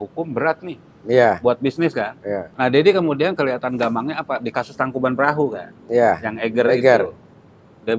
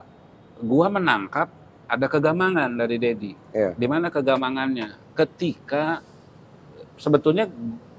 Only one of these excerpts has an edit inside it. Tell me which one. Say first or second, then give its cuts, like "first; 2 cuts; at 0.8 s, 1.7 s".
first; 1 cut; at 2.5 s